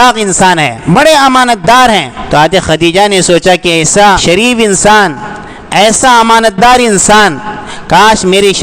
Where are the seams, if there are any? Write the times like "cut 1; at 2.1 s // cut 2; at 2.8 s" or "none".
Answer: cut 1; at 2.2 s // cut 2; at 4.2 s